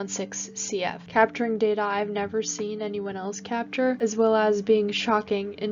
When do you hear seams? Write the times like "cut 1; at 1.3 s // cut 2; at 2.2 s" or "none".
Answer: none